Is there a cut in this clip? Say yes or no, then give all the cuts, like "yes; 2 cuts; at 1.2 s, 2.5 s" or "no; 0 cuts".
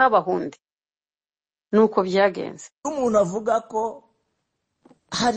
yes; 1 cut; at 2.8 s